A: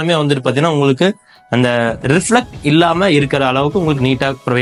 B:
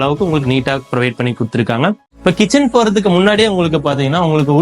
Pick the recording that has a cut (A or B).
B